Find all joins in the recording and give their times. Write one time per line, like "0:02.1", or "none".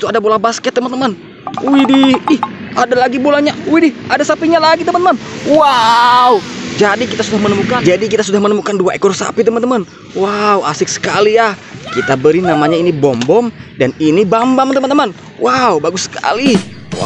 none